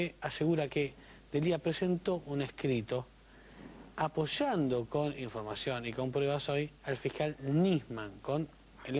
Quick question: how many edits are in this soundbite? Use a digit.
1